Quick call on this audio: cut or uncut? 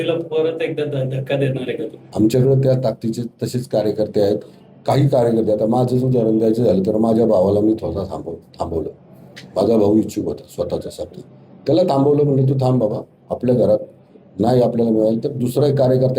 cut